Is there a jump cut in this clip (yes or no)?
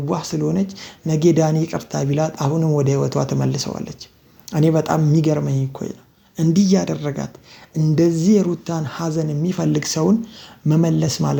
no